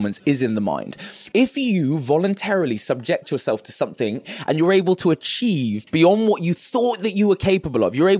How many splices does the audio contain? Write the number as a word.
two